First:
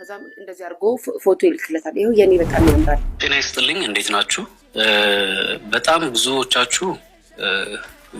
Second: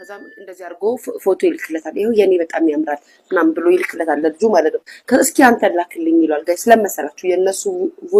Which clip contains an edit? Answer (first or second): first